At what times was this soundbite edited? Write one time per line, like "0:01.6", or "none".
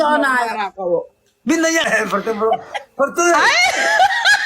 0:01.9